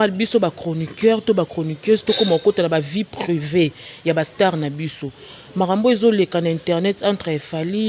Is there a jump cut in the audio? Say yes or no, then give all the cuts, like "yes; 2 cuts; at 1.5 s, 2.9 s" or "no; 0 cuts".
no; 0 cuts